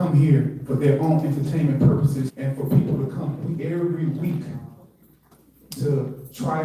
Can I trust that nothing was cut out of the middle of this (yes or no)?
no